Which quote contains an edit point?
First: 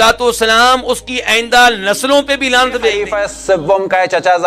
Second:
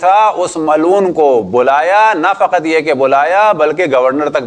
first; 1 cut; at 3.1 s

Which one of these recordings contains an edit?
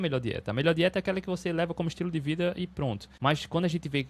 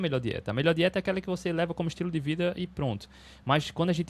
first; 1 cut; at 3.1 s

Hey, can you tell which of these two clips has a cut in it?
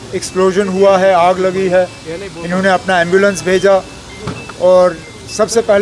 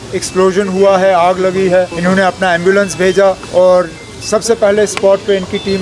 second; 2 cuts; at 1.9 s, 3.4 s

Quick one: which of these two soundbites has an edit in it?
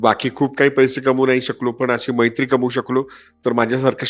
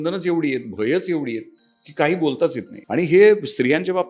second; 1 cut; at 2.7 s

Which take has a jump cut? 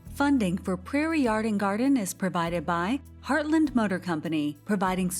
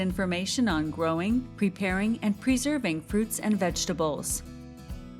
second; 1 cut; at 4.3 s

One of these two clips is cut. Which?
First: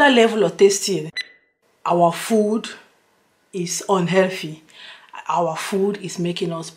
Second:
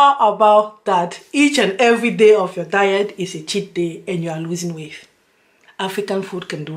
first; 1 cut; at 1.3 s

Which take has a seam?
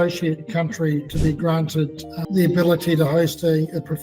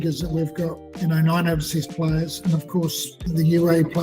second; 1 cut; at 3.1 s

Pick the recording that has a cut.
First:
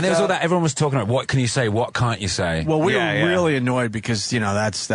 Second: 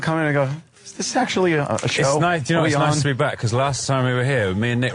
first; 1 cut; at 3.1 s

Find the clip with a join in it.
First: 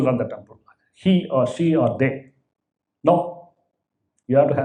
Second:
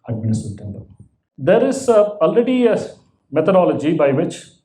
second; 1 cut; at 1.3 s

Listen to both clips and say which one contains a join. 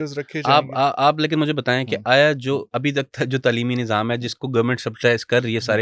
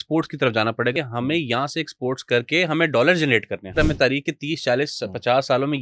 second; 2 cuts; at 0.9 s, 3.8 s

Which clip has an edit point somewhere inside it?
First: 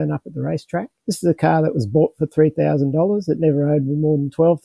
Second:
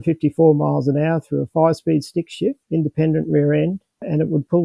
second; 1 cut; at 2.6 s

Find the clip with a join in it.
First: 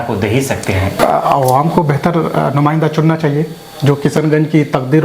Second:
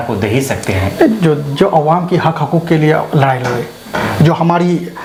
first; 1 cut; at 1.0 s

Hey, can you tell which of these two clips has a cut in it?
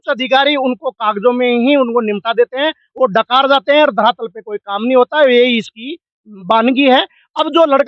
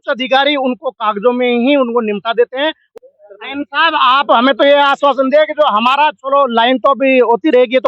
second; 2 cuts; at 2.8 s, 4.4 s

